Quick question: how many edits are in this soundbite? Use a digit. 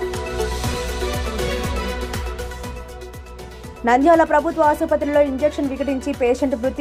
0